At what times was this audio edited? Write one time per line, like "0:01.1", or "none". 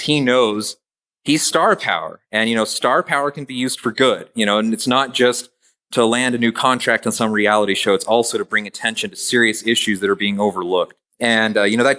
0:11.0